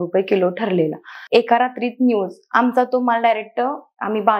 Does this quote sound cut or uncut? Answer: cut